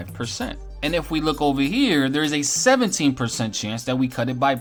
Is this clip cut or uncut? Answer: uncut